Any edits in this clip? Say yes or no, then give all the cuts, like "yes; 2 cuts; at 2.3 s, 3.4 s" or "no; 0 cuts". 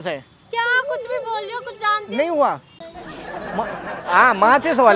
yes; 1 cut; at 2.8 s